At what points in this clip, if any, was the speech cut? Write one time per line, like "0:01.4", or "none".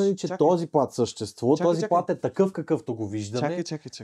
none